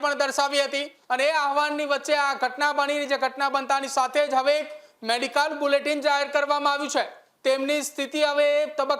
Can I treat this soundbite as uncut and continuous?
no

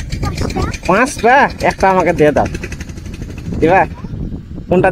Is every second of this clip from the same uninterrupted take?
yes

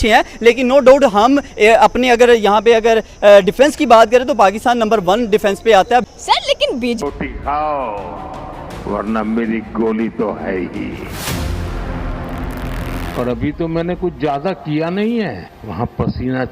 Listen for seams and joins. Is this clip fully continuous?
no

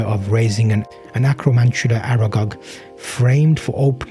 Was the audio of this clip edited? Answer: yes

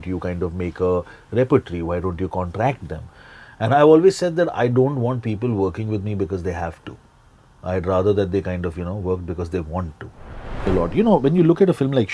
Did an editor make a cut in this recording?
yes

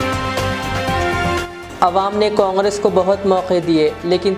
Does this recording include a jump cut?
yes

